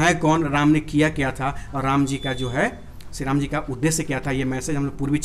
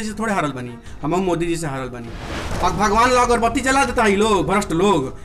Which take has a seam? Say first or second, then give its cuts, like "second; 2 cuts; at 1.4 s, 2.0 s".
second; 1 cut; at 2.4 s